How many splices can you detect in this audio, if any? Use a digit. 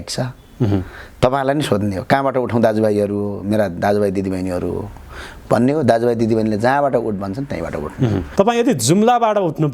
1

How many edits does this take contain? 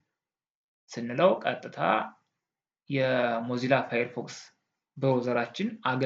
0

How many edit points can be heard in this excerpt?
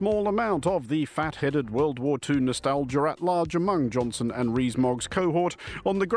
0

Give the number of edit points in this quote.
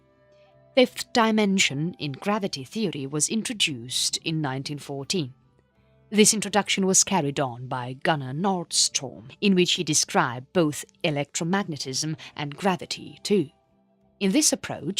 1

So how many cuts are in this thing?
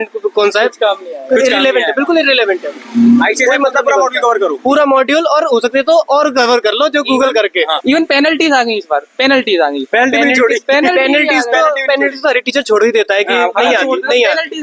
1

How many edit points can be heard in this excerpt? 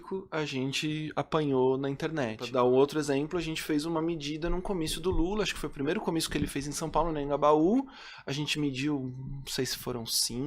1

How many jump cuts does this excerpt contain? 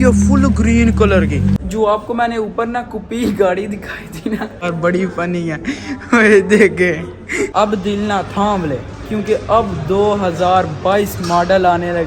3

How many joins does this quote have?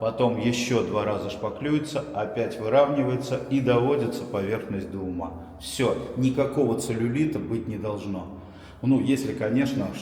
0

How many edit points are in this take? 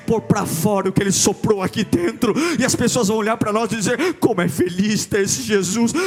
0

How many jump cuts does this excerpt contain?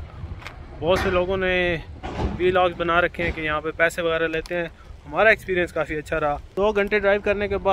1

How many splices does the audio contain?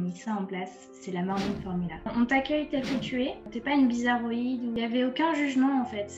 3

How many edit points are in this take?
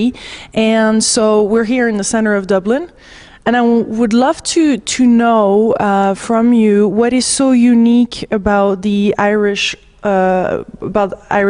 1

